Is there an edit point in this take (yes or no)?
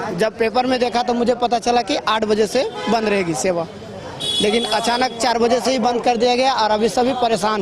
no